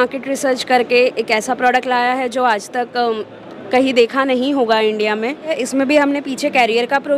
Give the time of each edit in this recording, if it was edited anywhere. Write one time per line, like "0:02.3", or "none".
0:05.5

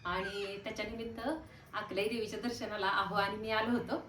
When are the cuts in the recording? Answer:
none

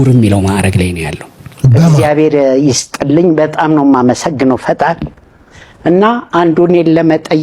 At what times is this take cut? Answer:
0:02.0

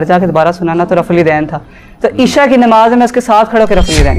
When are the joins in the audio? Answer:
none

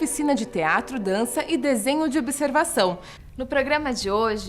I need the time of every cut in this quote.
0:03.1

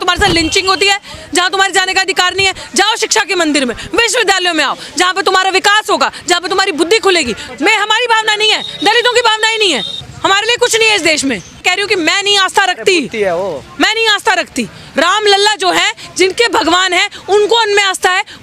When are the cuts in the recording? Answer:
0:07.4
0:10.1
0:11.6

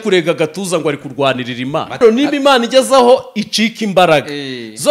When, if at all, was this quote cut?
0:02.0

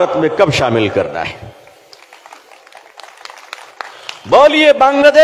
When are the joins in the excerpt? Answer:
none

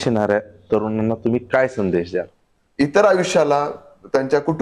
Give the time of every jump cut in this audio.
0:02.6

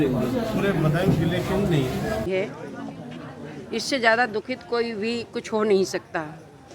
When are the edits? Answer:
0:02.3

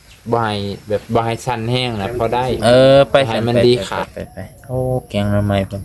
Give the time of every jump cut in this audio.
0:02.6
0:03.1
0:04.0

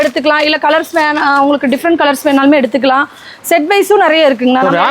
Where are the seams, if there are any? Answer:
none

